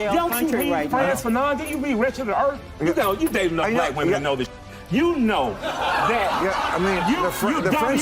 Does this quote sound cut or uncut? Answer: cut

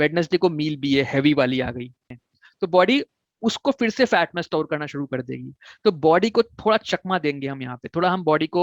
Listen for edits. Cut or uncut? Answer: cut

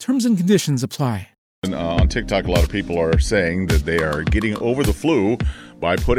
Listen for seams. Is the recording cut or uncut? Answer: cut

